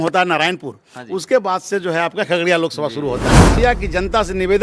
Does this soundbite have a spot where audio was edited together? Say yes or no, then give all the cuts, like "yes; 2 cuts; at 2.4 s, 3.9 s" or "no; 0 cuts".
yes; 1 cut; at 3.6 s